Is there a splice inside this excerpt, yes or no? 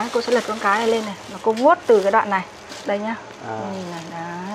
yes